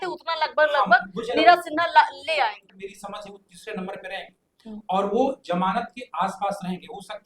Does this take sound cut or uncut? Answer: cut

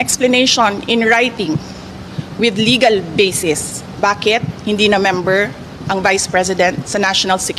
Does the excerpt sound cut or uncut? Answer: uncut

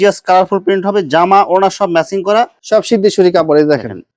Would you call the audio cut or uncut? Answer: cut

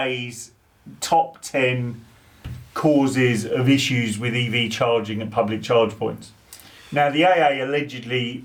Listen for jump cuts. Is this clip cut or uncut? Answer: uncut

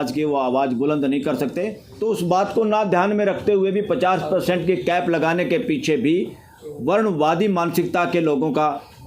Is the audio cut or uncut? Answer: cut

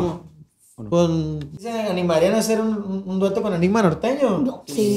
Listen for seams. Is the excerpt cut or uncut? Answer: cut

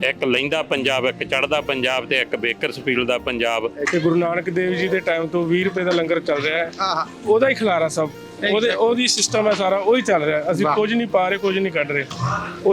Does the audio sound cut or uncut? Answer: cut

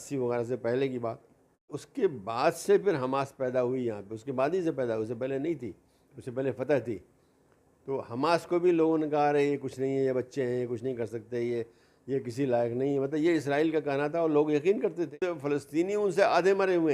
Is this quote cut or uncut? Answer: cut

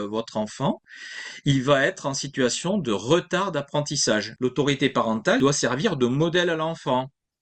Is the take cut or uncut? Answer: cut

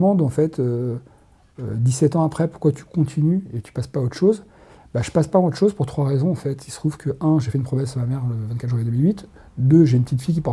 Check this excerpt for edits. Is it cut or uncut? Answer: uncut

